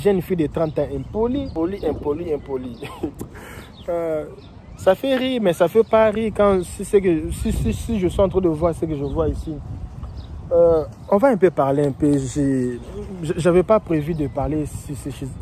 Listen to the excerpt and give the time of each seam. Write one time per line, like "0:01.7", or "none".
none